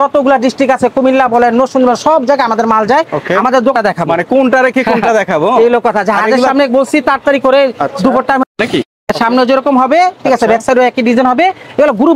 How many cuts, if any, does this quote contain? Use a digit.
2